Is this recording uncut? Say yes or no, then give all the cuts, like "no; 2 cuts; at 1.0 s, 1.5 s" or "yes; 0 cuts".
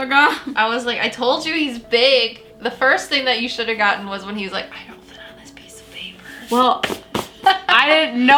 yes; 0 cuts